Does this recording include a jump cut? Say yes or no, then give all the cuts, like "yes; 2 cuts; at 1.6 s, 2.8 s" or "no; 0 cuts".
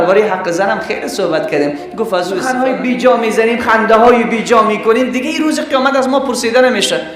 yes; 1 cut; at 2.6 s